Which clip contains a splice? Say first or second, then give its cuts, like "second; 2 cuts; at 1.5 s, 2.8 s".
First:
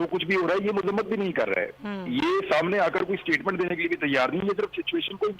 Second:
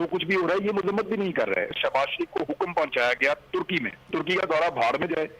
second; 2 cuts; at 1.8 s, 4.1 s